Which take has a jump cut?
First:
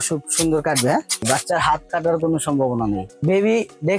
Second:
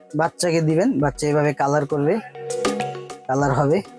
first; 2 cuts; at 1.2 s, 3.2 s

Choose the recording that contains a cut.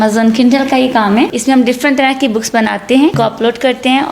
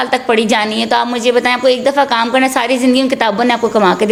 first; 2 cuts; at 1.4 s, 3.2 s

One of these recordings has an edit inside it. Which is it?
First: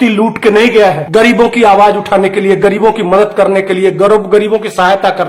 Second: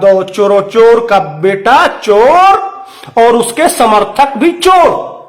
first; 1 cut; at 1.0 s

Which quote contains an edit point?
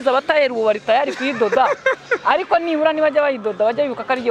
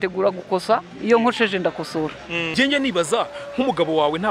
second; 1 cut; at 2.6 s

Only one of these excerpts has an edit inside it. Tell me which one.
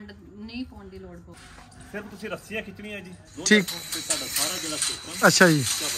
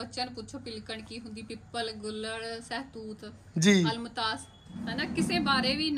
first; 1 cut; at 1.2 s

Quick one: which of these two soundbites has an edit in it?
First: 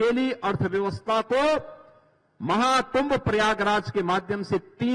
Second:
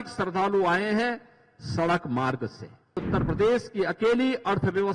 second; 1 cut; at 3.0 s

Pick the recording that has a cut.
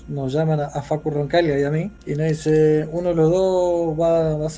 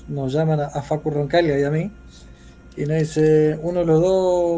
first; 1 cut; at 2.0 s

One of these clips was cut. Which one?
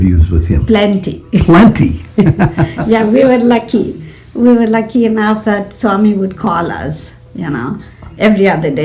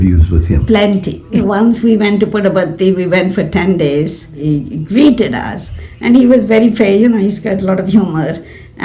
second; 2 cuts; at 1.4 s, 4.4 s

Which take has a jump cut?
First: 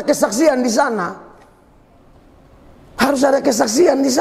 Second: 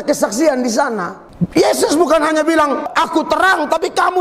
second; 2 cuts; at 1.2 s, 2.9 s

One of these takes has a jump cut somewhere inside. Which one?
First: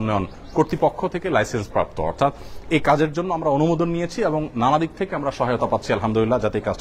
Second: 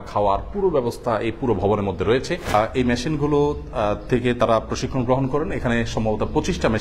second; 1 cut; at 2.5 s

